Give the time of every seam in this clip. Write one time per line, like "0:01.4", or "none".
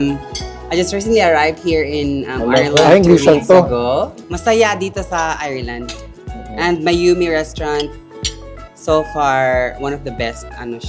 0:04.2